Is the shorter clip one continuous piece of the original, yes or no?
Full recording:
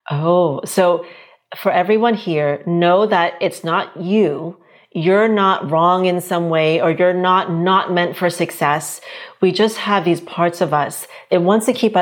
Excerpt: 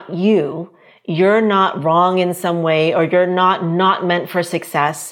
yes